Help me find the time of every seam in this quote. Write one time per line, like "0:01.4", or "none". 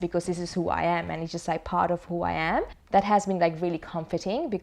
0:02.8